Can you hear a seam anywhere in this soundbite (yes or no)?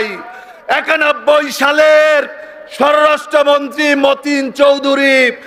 no